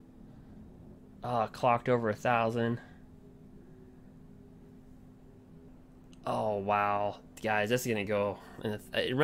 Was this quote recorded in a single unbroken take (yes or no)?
no